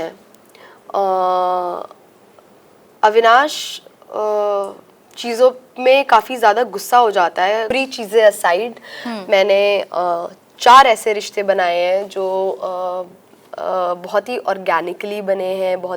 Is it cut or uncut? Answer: cut